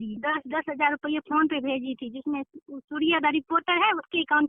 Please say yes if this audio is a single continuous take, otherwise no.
yes